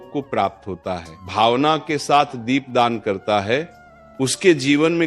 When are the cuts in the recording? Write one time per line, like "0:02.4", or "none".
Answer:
0:01.2